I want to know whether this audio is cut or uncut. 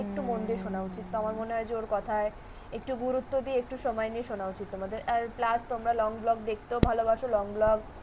uncut